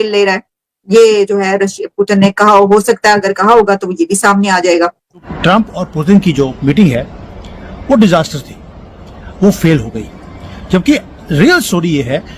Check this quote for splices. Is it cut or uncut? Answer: cut